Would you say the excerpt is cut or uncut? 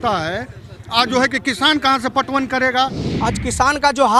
cut